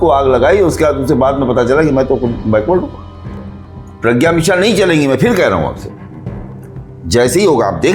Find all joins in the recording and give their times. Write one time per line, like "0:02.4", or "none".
0:03.4